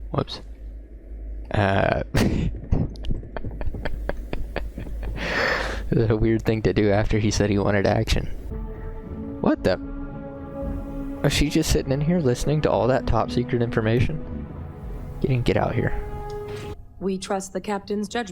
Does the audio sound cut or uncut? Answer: cut